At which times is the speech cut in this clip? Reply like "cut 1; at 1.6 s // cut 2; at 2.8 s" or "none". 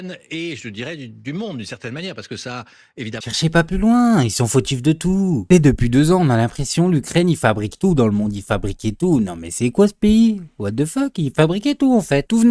cut 1; at 3.2 s